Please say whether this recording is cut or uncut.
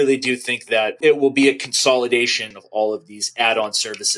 cut